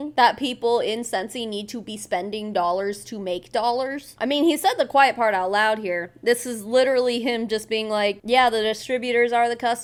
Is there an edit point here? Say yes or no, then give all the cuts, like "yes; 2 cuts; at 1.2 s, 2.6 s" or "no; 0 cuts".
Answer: no; 0 cuts